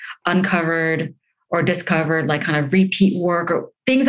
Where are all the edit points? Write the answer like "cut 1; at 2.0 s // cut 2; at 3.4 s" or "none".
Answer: none